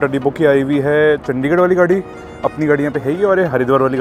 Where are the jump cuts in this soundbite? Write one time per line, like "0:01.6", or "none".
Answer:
none